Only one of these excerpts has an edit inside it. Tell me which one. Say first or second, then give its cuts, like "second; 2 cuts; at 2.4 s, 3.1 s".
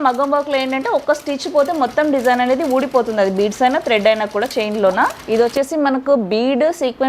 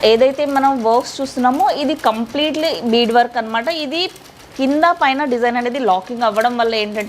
first; 1 cut; at 5.2 s